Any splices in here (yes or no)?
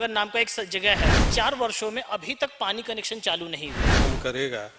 yes